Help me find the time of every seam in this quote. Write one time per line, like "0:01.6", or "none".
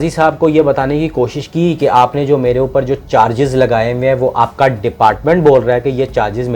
none